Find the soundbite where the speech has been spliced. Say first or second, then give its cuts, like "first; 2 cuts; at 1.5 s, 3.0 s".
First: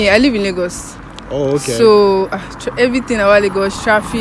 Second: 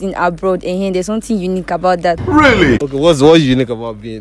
second; 1 cut; at 2.4 s